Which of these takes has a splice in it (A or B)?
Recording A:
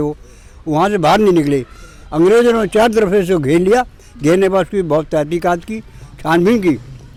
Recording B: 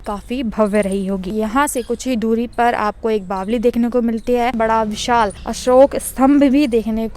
B